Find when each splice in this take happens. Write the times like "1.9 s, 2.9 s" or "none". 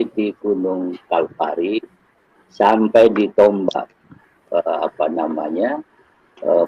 none